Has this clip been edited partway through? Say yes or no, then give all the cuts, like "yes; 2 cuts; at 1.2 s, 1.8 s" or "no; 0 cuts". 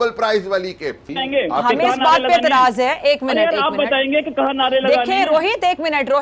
yes; 1 cut; at 1.1 s